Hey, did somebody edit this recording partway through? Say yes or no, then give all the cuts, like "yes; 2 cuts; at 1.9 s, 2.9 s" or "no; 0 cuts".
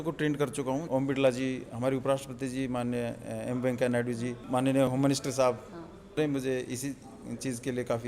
yes; 3 cuts; at 0.8 s, 4.4 s, 6.2 s